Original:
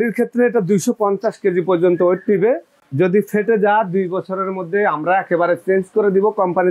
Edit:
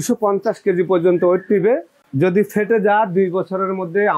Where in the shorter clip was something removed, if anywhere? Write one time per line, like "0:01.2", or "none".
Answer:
none